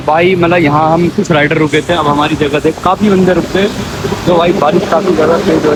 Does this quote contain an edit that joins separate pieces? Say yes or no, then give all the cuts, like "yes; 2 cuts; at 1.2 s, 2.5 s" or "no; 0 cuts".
no; 0 cuts